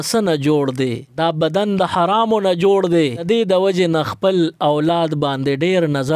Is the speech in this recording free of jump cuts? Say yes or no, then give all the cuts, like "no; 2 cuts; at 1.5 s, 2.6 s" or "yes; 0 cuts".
no; 2 cuts; at 1.1 s, 3.2 s